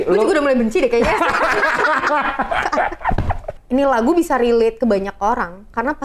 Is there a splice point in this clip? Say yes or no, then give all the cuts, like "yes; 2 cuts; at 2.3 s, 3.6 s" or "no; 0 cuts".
yes; 1 cut; at 3.6 s